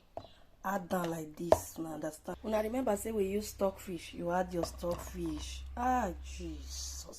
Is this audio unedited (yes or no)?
no